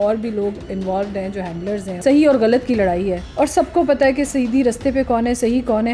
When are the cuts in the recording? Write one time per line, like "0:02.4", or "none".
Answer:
0:01.9
0:03.2